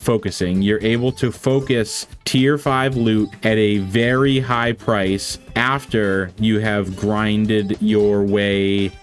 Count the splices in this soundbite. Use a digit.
0